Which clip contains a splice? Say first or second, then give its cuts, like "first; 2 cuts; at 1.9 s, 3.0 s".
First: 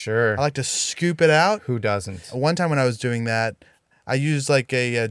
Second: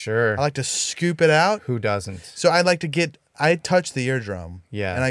first; 1 cut; at 2.3 s